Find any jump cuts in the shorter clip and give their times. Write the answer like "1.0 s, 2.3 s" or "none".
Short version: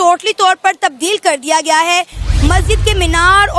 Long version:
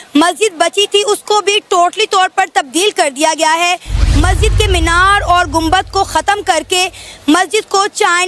none